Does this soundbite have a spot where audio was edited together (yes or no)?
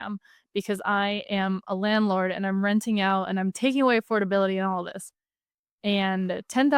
no